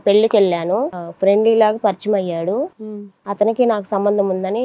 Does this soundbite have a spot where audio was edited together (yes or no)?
yes